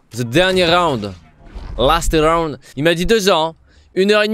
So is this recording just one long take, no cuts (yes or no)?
yes